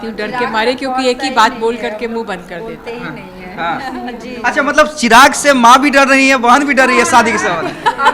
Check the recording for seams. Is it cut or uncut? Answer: uncut